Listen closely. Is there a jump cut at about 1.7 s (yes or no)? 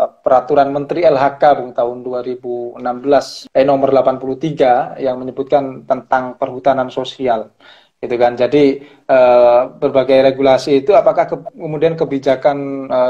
no